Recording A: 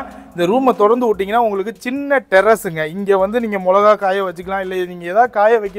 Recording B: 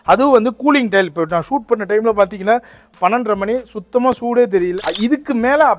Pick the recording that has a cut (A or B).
B